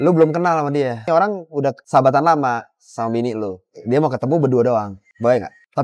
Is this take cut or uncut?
cut